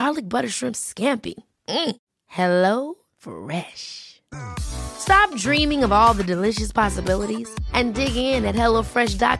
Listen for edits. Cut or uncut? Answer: uncut